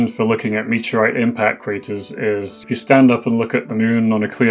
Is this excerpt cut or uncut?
cut